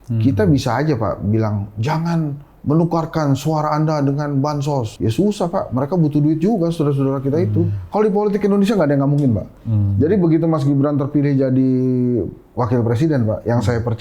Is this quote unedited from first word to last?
no; 2 cuts; at 4.9 s, 7.8 s

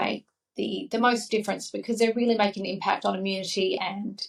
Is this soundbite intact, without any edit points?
yes; 0 cuts

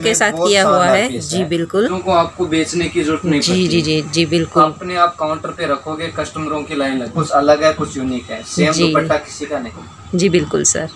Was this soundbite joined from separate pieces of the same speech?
yes; 2 cuts; at 1.9 s, 7.1 s

